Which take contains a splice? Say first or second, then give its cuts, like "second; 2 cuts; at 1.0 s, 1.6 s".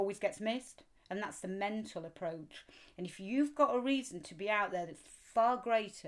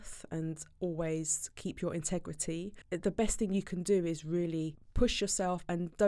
second; 2 cuts; at 2.8 s, 4.8 s